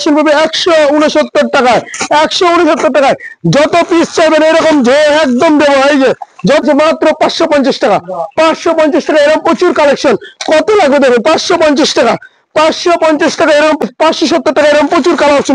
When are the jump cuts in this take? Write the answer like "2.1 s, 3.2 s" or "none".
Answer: 6.6 s, 13.8 s